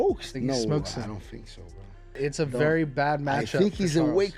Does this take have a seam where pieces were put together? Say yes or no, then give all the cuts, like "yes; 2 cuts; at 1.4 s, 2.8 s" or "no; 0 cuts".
yes; 1 cut; at 2.2 s